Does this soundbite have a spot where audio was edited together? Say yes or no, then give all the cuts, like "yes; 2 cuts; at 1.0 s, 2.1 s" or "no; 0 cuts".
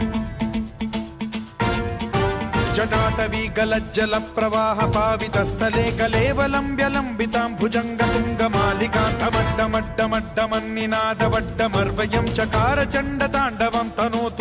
no; 0 cuts